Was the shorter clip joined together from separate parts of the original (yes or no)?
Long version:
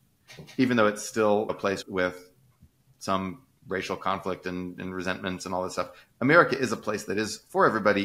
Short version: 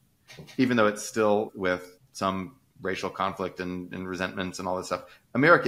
yes